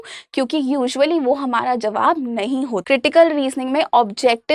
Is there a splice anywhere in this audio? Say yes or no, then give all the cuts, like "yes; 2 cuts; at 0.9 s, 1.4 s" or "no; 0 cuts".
yes; 1 cut; at 2.8 s